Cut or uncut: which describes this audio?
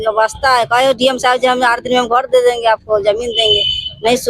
uncut